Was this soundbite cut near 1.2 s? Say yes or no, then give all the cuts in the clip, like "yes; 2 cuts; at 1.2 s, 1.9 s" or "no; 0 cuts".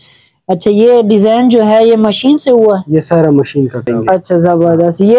no; 1 cut; at 3.9 s